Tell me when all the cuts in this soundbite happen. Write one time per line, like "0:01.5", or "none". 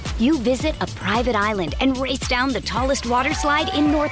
none